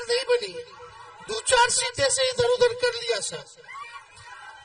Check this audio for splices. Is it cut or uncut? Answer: uncut